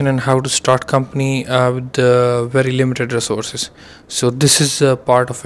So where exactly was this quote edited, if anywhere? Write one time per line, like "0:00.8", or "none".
none